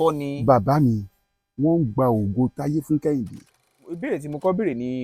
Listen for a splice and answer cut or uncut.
cut